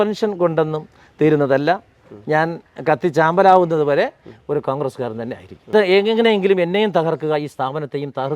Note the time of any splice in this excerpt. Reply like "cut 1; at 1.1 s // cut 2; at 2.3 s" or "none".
cut 1; at 5.7 s